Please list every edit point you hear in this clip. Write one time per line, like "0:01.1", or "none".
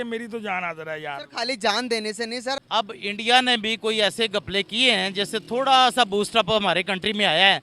0:02.6